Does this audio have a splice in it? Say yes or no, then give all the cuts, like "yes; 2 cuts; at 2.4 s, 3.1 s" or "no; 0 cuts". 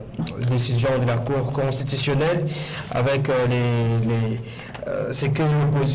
no; 0 cuts